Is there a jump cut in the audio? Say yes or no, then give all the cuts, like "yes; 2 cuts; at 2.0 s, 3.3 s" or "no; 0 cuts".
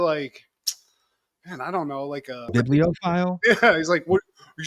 no; 0 cuts